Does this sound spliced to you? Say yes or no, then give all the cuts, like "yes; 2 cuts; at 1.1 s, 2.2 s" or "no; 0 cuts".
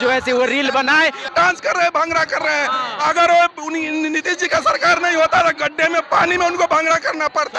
yes; 1 cut; at 1.3 s